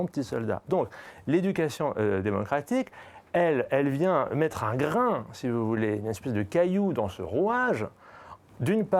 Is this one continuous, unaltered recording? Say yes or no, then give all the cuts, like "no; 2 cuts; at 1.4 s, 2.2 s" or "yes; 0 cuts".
yes; 0 cuts